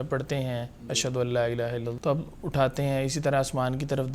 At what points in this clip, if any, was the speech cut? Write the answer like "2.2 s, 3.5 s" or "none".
1.9 s